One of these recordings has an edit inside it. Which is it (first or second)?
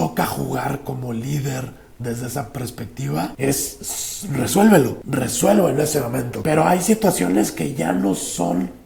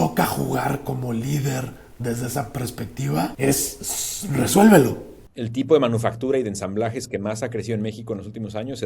second